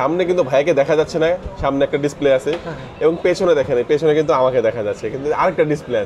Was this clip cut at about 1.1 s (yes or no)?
no